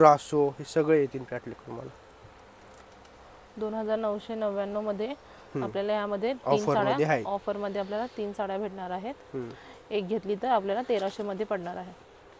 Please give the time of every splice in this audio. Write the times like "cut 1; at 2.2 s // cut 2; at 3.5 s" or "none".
none